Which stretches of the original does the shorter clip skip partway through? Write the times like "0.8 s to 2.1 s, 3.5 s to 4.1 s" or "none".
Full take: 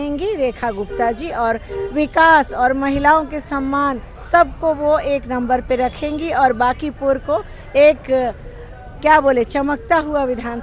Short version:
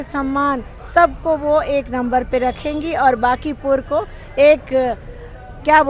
none